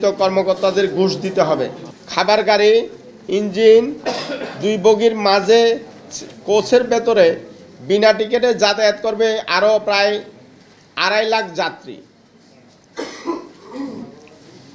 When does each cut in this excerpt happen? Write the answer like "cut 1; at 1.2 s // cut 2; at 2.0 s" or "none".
none